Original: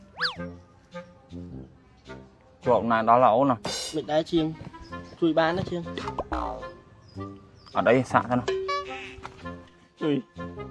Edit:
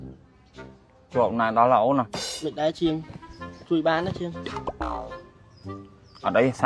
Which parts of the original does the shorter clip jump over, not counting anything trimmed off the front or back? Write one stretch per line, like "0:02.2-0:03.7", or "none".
none